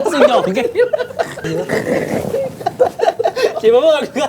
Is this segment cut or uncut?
cut